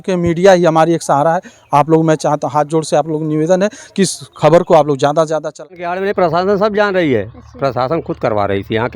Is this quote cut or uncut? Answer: cut